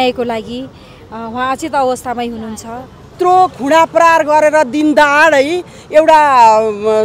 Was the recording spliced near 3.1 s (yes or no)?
yes